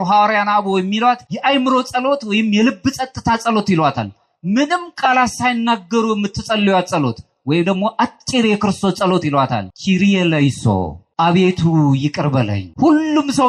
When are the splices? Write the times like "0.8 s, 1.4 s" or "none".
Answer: 1.3 s, 9.7 s, 11.0 s, 12.6 s